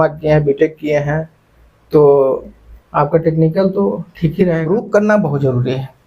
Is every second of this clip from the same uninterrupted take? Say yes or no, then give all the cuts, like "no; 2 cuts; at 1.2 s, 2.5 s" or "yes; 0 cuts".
no; 1 cut; at 4.6 s